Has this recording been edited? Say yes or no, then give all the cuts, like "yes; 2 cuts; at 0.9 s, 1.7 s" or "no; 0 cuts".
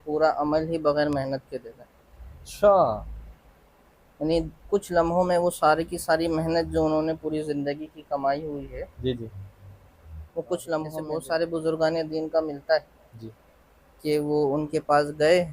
yes; 1 cut; at 11.0 s